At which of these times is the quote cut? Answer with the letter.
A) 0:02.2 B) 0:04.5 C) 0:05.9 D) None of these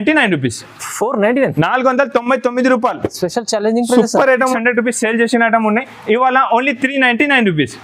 B